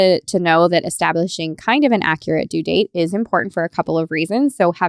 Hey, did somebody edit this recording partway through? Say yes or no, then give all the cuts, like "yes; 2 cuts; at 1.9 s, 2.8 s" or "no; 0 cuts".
no; 0 cuts